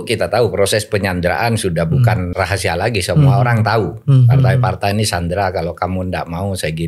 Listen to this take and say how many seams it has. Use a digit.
1